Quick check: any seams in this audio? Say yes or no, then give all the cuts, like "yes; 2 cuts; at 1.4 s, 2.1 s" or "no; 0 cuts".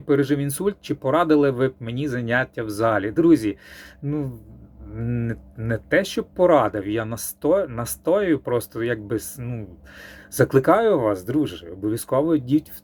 no; 0 cuts